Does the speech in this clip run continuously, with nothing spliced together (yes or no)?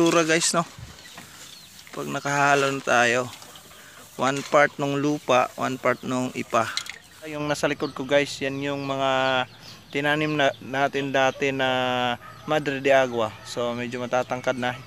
no